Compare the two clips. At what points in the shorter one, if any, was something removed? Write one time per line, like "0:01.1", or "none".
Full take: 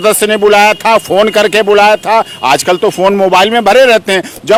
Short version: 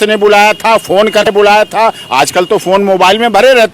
0:01.3